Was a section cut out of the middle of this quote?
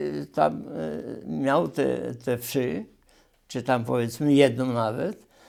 no; 0 cuts

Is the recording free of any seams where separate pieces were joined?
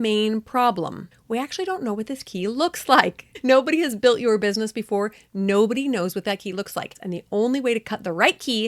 no; 3 cuts; at 1.1 s, 3.3 s, 7.0 s

